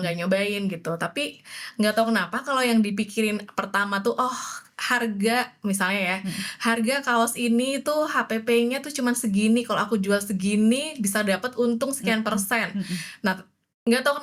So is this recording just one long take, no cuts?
yes; 0 cuts

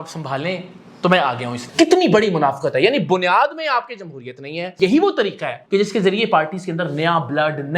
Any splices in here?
yes; 2 cuts; at 1.6 s, 4.7 s

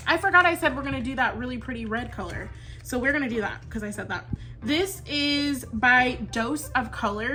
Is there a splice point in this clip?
no; 0 cuts

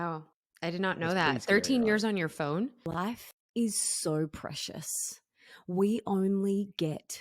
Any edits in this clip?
yes; 1 cut; at 3.0 s

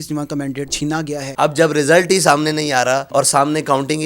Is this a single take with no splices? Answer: no; 2 cuts; at 1.0 s, 3.1 s

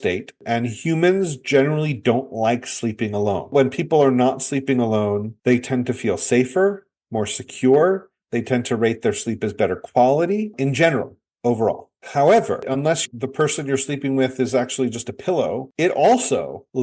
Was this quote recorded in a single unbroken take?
no; 2 cuts; at 3.5 s, 12.7 s

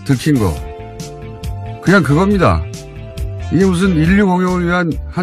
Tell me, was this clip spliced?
no; 0 cuts

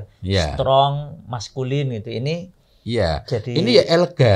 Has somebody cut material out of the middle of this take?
no; 0 cuts

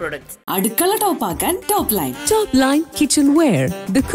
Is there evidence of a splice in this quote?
no; 0 cuts

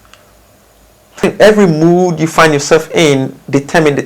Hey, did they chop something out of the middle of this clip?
yes; 1 cut; at 1.2 s

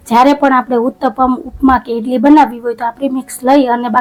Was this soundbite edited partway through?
no; 0 cuts

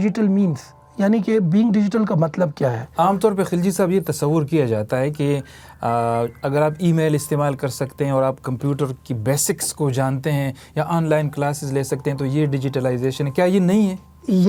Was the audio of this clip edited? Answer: no; 0 cuts

